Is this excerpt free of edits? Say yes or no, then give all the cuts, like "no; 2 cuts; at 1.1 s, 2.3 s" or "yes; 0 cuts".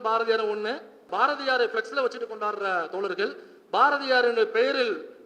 no; 1 cut; at 1.1 s